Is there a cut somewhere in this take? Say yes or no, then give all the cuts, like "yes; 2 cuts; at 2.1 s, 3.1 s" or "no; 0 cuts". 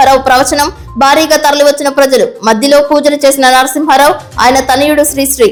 no; 0 cuts